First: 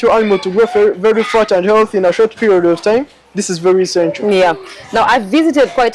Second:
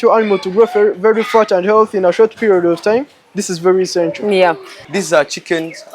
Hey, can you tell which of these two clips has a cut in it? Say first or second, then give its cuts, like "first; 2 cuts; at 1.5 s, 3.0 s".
second; 1 cut; at 4.7 s